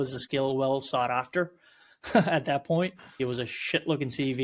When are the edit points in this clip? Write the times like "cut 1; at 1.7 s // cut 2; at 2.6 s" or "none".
cut 1; at 3.2 s